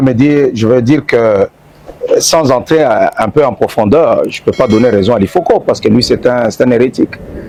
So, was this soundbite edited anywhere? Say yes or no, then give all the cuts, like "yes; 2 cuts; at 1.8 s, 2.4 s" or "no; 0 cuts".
no; 0 cuts